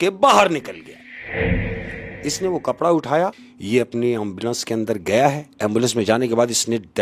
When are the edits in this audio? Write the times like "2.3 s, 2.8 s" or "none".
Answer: 2.0 s, 3.5 s, 5.5 s